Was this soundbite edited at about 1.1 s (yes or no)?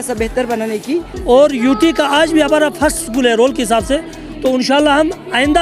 yes